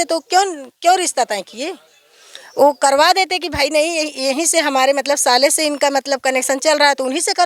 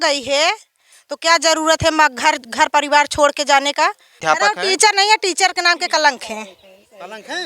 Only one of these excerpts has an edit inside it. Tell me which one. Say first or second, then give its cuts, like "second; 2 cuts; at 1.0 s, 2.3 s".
second; 1 cut; at 4.2 s